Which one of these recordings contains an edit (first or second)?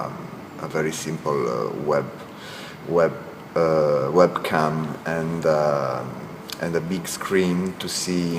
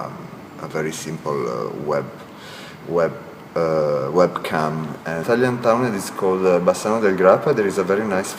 first